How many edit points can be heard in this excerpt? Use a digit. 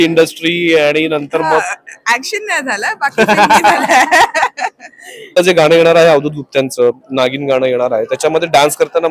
1